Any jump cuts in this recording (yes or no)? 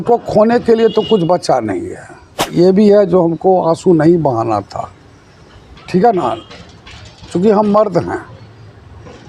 yes